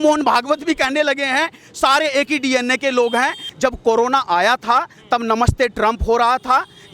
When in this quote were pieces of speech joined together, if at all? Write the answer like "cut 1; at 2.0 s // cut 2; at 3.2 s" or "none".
cut 1; at 3.4 s